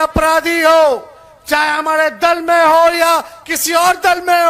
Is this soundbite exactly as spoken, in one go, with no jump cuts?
yes; 0 cuts

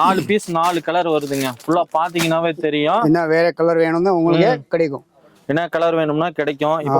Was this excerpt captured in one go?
yes; 0 cuts

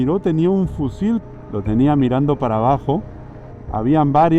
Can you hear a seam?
yes; 1 cut; at 1.2 s

